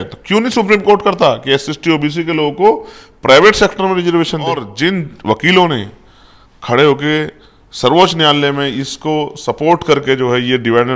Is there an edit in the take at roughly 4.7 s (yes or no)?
yes